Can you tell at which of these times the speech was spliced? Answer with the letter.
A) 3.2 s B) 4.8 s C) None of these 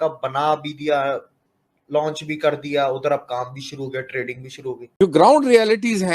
B